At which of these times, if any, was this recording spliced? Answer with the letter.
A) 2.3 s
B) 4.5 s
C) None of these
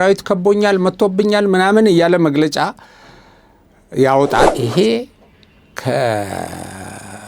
B